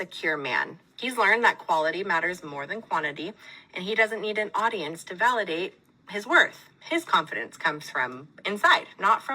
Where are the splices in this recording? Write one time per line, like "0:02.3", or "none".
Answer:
0:01.3